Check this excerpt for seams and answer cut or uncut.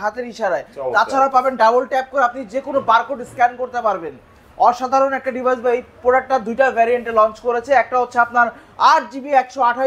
uncut